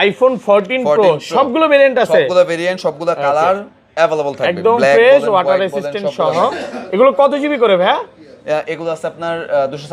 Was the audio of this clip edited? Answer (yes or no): no